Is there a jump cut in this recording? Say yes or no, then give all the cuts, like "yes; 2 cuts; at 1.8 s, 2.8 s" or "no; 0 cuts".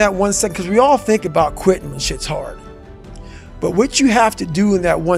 no; 0 cuts